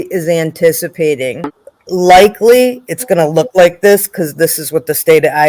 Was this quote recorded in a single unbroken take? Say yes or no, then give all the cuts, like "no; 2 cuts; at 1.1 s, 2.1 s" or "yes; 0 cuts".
no; 1 cut; at 1.3 s